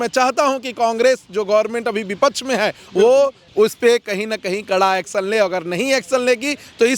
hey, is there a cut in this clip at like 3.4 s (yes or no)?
yes